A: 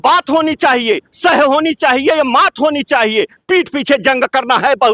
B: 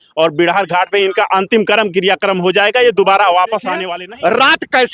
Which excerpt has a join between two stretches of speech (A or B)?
B